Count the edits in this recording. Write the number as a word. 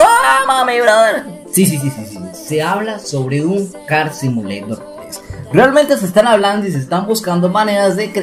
zero